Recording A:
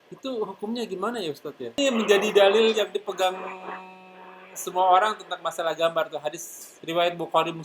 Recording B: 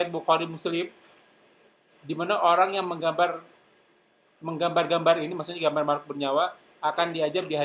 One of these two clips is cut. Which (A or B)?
A